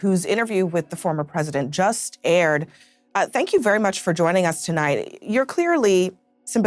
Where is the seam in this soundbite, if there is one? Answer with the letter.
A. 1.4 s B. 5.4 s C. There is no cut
C